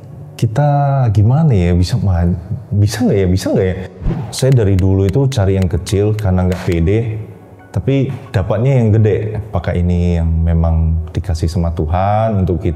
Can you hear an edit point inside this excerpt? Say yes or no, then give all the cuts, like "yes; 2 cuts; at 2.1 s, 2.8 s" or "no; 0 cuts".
yes; 3 cuts; at 4.0 s, 8.2 s, 9.5 s